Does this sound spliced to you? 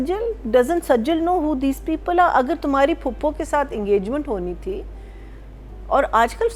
no; 0 cuts

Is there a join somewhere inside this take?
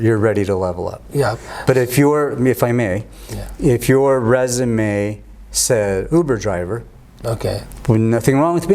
no; 0 cuts

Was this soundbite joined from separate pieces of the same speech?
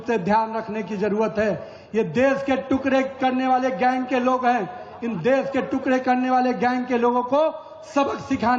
no; 0 cuts

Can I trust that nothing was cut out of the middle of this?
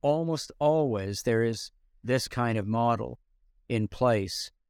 yes; 0 cuts

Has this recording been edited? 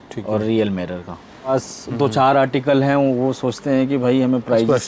yes; 1 cut; at 1.5 s

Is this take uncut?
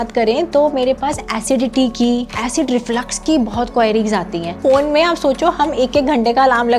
no; 2 cuts; at 2.4 s, 4.6 s

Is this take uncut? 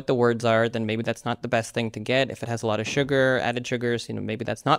yes; 0 cuts

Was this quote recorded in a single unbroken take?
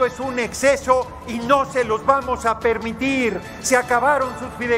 yes; 0 cuts

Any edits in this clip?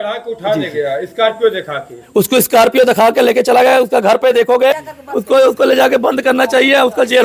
yes; 1 cut; at 4.9 s

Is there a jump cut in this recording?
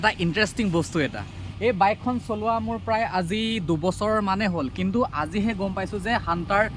no; 0 cuts

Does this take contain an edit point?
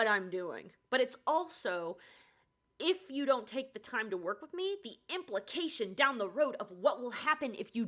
no; 0 cuts

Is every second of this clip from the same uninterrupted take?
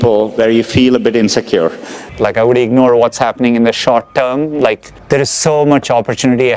no; 1 cut; at 2.0 s

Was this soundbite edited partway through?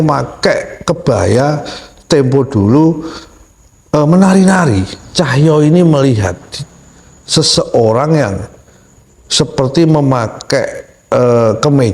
yes; 1 cut; at 5.0 s

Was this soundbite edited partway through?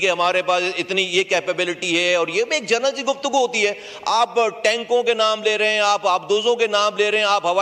no; 0 cuts

